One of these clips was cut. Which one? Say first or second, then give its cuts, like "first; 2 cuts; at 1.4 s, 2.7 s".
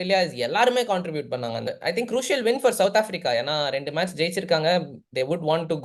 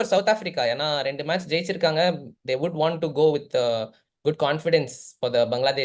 first; 1 cut; at 1.7 s